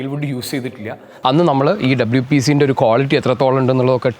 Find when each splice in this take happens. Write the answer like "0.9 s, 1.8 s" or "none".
1.1 s

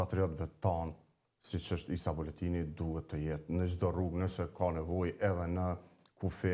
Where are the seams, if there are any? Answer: none

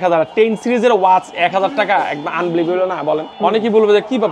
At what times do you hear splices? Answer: 3.3 s

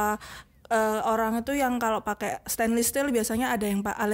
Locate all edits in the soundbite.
none

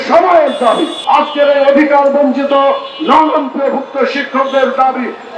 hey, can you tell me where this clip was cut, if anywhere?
1.0 s

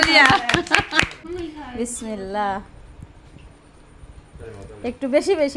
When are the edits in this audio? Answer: 1.2 s

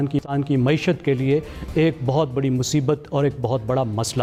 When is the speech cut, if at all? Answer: none

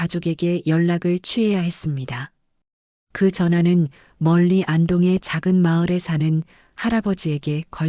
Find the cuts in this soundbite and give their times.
5.6 s

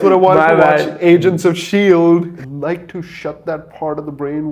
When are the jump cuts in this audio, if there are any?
2.4 s

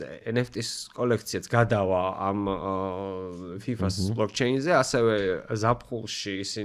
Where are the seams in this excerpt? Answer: none

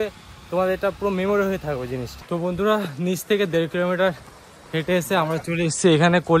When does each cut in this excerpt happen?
2.1 s

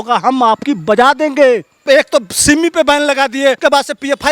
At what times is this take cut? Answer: 1.8 s, 3.6 s

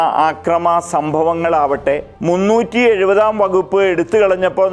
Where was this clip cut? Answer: 2.1 s

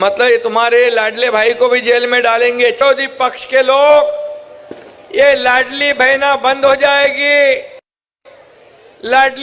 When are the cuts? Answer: 2.8 s

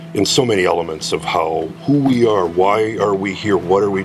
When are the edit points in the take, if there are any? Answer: 1.7 s

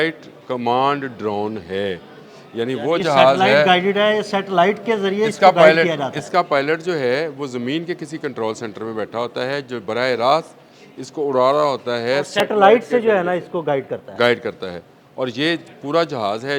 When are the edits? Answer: none

